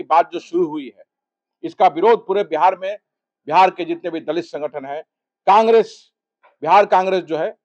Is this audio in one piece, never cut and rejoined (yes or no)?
yes